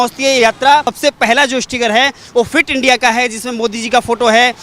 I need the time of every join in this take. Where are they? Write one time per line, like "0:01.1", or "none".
0:00.9